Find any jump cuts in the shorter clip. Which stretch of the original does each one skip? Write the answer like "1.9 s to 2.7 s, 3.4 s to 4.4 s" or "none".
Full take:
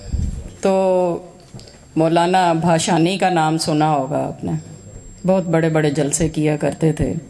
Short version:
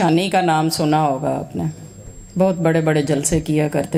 none